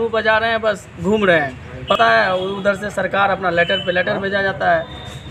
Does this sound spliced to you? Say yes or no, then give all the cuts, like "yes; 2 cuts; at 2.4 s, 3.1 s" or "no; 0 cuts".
yes; 1 cut; at 2.0 s